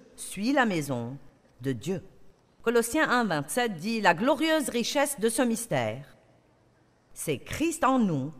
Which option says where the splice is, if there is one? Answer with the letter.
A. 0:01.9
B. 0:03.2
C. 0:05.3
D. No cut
D